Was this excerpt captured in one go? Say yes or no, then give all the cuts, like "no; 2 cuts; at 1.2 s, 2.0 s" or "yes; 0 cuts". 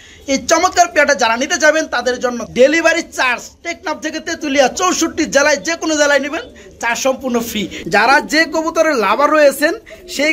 no; 2 cuts; at 2.4 s, 7.7 s